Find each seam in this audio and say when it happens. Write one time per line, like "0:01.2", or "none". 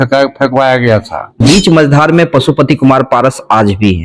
0:01.4